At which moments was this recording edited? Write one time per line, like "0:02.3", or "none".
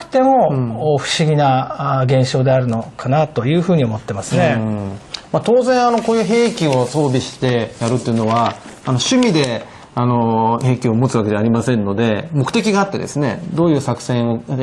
none

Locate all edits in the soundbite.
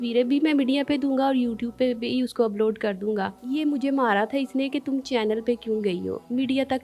0:03.4

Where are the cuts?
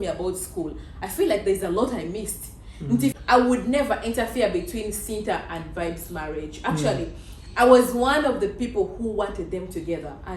0:03.2

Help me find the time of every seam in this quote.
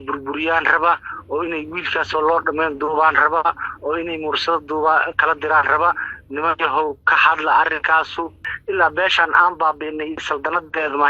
0:08.5

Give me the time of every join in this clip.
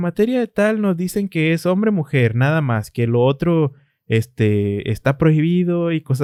none

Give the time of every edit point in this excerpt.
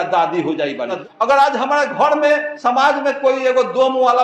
0:01.0
0:02.5

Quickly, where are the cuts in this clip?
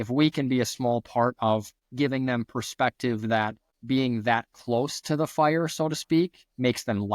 0:01.8
0:03.7

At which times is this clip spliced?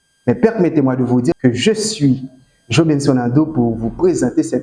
0:01.3

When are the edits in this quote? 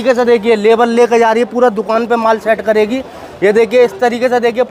none

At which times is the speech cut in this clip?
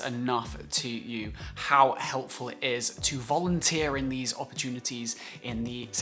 none

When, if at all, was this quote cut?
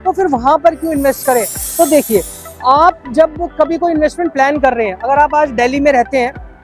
none

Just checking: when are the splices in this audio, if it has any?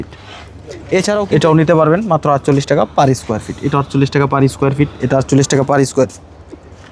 none

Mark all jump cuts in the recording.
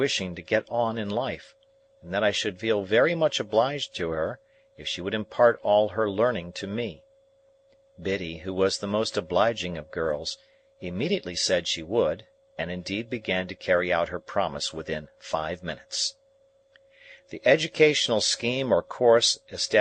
0:13.2

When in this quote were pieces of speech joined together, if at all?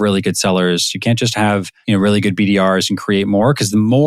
0:01.7

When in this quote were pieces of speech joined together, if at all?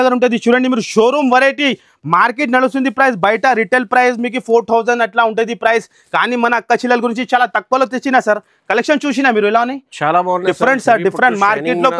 none

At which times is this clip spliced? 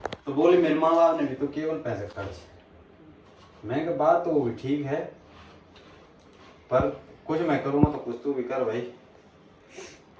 none

